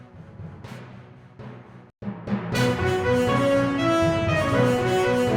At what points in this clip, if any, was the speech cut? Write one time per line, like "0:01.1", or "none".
none